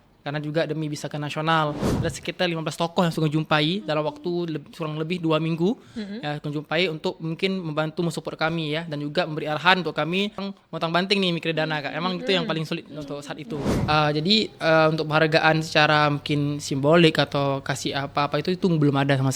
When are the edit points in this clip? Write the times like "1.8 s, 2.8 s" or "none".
1.9 s, 10.4 s, 13.7 s